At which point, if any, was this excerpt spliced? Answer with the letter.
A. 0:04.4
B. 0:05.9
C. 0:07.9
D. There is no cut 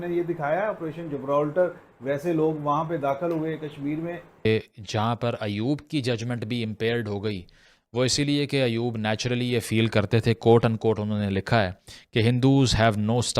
A